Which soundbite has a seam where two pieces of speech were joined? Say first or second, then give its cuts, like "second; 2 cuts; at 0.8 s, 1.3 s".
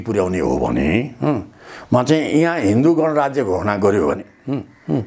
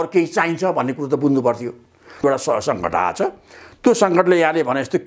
second; 1 cut; at 2.2 s